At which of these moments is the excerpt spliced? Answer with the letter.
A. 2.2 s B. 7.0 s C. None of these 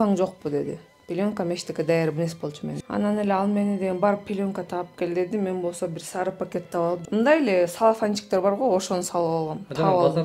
B